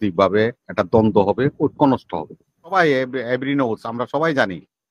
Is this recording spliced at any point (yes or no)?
yes